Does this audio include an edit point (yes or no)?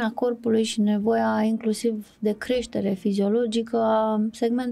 no